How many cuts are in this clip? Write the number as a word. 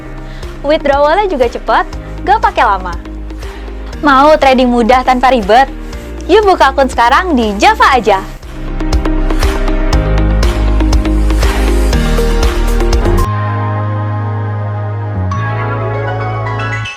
zero